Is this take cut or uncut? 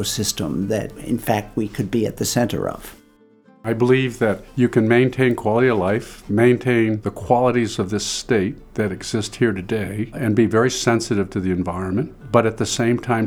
cut